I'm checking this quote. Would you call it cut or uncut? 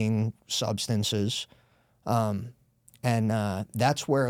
uncut